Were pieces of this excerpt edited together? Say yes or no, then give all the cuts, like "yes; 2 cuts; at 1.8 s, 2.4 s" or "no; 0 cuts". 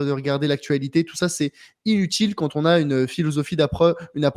no; 0 cuts